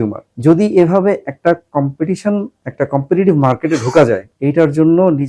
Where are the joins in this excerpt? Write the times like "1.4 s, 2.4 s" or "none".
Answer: none